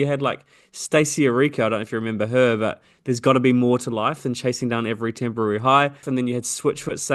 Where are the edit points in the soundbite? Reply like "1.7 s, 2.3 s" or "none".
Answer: 6.0 s